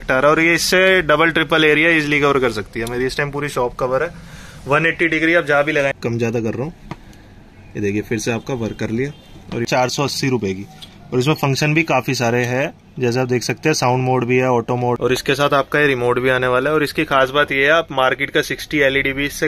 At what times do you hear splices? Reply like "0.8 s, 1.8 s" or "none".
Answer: 6.0 s, 9.7 s, 15.0 s